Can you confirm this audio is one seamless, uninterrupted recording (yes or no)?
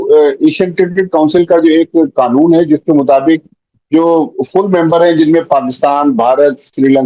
yes